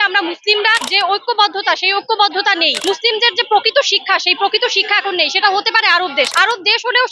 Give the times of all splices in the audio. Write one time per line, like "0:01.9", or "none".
0:00.8
0:02.7
0:06.3